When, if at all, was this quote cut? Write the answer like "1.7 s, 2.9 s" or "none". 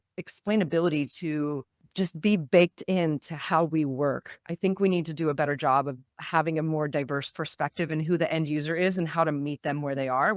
1.8 s